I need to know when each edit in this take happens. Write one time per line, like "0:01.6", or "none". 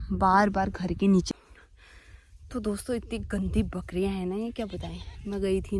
0:01.3